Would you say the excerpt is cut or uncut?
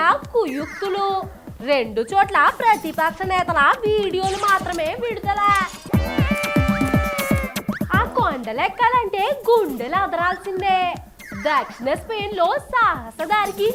uncut